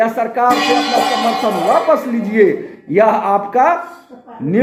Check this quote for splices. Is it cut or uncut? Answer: uncut